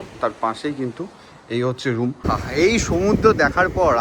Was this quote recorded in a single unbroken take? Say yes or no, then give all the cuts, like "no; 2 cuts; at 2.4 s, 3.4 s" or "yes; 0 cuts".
no; 1 cut; at 2.2 s